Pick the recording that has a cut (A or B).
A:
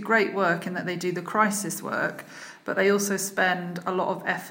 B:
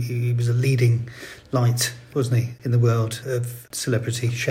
B